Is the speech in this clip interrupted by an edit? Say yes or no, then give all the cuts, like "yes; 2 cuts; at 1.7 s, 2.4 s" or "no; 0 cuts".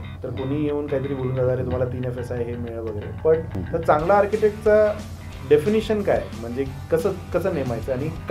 yes; 1 cut; at 3.6 s